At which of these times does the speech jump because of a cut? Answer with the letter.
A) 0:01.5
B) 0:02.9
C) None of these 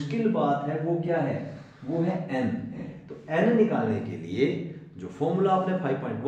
B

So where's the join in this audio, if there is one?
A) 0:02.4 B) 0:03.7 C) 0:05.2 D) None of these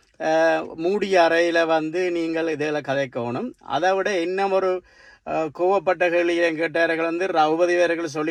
D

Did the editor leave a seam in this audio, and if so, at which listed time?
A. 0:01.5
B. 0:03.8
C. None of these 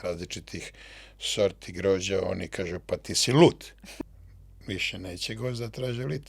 B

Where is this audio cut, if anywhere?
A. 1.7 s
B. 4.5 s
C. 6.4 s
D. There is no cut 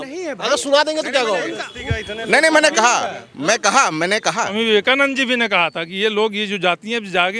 B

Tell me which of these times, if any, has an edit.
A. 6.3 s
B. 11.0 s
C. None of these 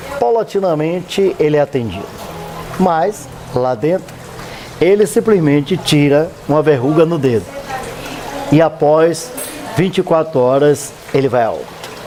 C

